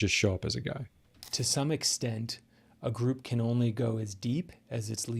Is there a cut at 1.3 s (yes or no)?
yes